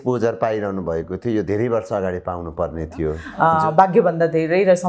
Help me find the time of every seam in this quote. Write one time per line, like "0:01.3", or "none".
0:03.2